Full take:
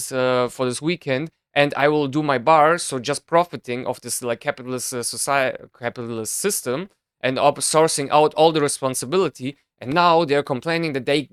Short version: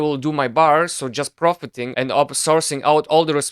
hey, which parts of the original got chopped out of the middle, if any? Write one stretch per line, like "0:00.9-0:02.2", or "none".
0:03.7-0:07.0